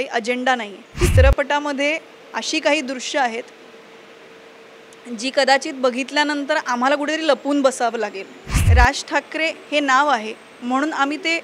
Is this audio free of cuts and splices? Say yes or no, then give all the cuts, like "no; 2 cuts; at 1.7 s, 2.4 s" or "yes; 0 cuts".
no; 2 cuts; at 0.9 s, 8.5 s